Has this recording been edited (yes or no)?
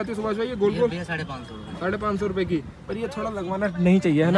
no